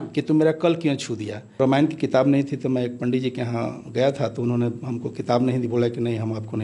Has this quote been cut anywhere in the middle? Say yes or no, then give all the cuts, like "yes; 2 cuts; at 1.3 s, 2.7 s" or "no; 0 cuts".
yes; 1 cut; at 1.6 s